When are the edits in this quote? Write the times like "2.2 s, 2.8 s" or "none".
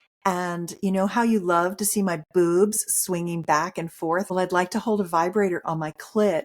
4.3 s